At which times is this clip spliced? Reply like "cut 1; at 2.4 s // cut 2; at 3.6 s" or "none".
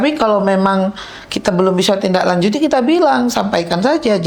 none

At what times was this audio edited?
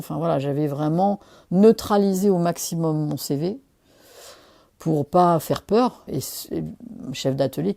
cut 1; at 6.0 s

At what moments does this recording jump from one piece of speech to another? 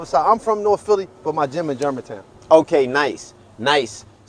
none

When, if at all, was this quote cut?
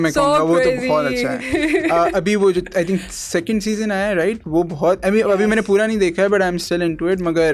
none

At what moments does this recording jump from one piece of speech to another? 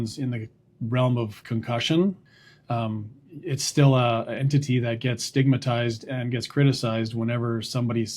cut 1; at 2.3 s

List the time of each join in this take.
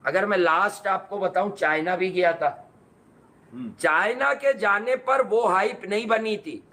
none

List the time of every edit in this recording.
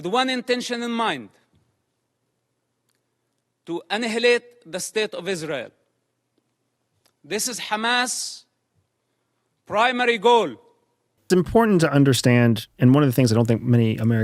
cut 1; at 11.1 s

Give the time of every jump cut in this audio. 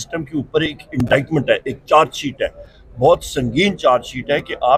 none

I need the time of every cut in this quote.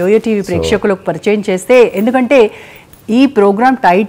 none

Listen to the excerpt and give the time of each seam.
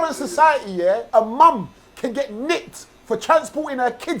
cut 1; at 1.0 s

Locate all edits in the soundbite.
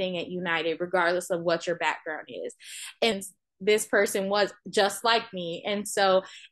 cut 1; at 3.1 s

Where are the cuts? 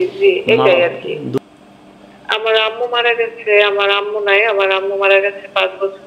cut 1; at 1.4 s

